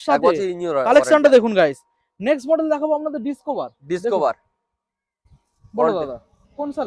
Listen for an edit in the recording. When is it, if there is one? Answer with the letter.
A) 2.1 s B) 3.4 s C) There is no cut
C